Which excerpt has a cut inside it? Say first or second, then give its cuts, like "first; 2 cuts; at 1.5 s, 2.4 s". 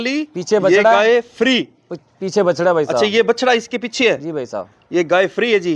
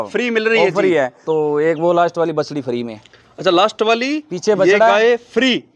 second; 1 cut; at 1.2 s